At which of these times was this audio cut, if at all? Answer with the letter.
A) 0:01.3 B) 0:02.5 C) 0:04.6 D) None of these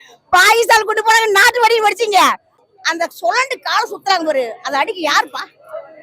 B